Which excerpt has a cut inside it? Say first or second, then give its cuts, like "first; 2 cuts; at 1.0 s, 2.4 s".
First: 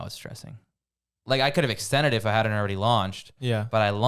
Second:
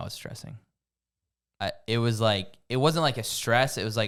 first; 1 cut; at 1.2 s